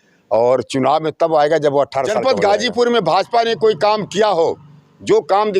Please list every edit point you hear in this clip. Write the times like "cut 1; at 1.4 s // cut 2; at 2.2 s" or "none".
cut 1; at 2.2 s